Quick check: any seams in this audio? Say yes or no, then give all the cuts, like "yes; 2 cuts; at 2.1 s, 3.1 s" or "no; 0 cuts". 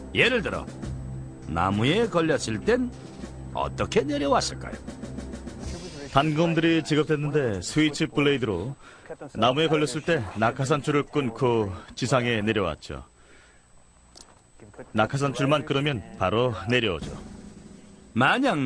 yes; 1 cut; at 4.1 s